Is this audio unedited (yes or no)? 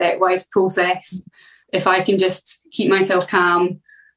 no